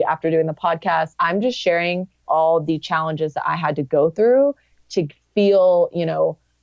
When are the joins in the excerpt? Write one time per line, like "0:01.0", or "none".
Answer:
0:01.1
0:02.2